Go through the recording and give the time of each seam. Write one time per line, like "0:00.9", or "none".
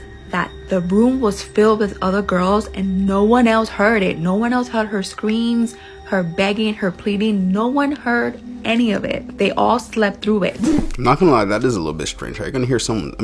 none